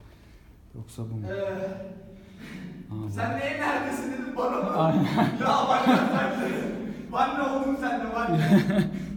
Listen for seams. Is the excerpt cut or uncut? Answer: uncut